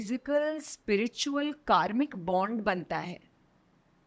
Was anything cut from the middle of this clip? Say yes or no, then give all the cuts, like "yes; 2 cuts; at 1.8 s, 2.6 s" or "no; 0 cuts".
no; 0 cuts